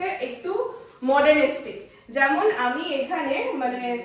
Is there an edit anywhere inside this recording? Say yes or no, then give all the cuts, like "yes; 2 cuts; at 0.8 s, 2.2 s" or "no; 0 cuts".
no; 0 cuts